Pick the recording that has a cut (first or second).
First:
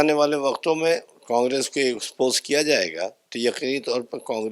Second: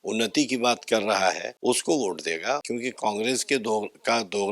second